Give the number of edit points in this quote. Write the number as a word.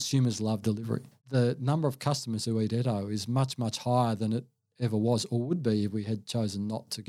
one